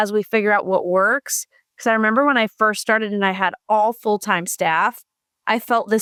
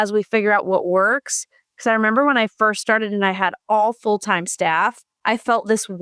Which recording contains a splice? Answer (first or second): second